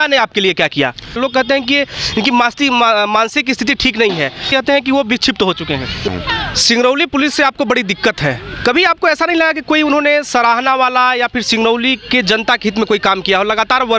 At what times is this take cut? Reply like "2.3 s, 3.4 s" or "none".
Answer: 1.2 s, 4.4 s, 6.1 s